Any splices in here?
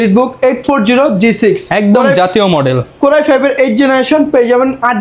no; 0 cuts

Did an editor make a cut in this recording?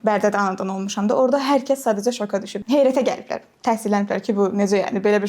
yes; 1 cut; at 2.5 s

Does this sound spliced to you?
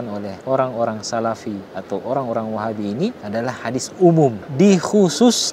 no; 0 cuts

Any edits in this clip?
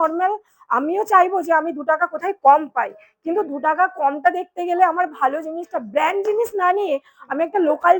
no; 0 cuts

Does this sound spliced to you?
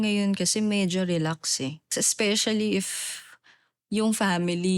yes; 1 cut; at 1.9 s

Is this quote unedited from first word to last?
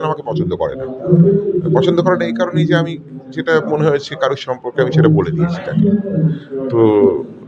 yes; 0 cuts

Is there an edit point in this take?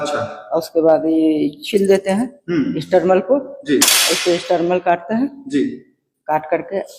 no; 0 cuts

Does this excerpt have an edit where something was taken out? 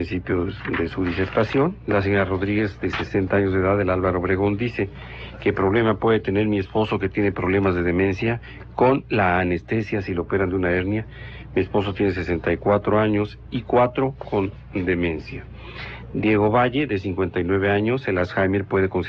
yes; 1 cut; at 13.2 s

